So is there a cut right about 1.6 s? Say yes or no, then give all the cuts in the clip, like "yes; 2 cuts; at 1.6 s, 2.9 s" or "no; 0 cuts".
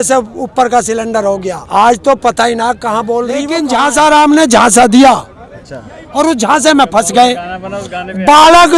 yes; 2 cuts; at 1.6 s, 3.6 s